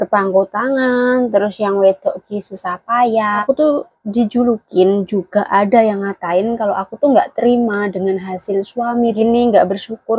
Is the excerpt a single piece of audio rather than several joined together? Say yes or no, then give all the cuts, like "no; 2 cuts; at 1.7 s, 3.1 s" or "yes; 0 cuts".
no; 2 cuts; at 3.4 s, 9.2 s